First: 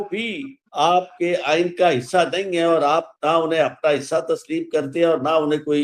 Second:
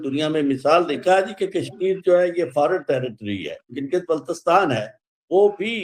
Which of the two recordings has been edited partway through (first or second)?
second